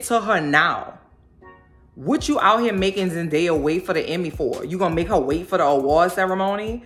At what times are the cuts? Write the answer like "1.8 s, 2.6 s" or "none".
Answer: none